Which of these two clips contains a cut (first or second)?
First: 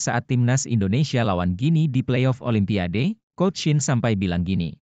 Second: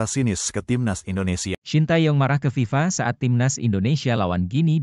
second